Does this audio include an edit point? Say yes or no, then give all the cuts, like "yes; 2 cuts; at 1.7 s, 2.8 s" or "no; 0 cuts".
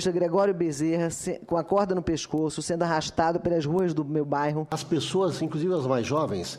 yes; 1 cut; at 4.8 s